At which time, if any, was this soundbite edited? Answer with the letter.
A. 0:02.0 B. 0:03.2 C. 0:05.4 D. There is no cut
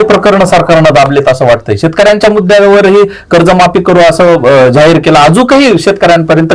D